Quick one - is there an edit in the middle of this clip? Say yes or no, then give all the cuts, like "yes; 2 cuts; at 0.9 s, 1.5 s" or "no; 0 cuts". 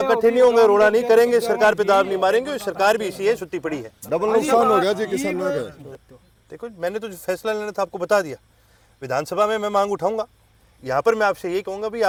no; 0 cuts